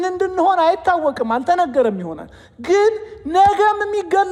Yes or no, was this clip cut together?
no